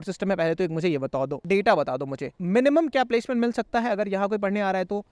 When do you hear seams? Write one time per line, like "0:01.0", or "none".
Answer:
0:01.4